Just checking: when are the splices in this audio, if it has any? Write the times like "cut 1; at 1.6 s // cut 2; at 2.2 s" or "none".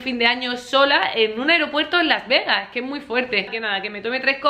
none